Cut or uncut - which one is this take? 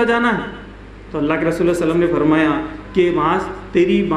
uncut